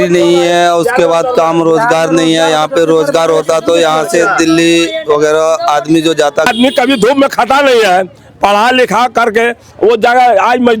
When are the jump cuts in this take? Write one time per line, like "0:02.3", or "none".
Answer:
0:06.5